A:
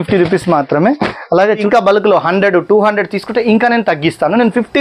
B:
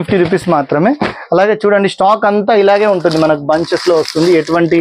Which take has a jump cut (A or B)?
A